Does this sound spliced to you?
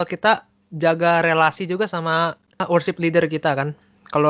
no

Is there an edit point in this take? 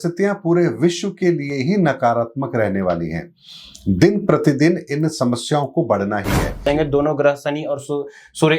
yes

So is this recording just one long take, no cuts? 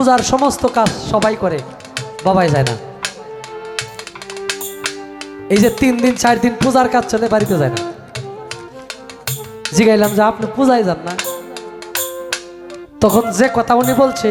yes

